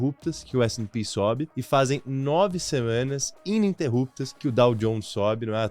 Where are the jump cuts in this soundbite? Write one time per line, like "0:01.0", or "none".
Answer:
0:01.5
0:04.3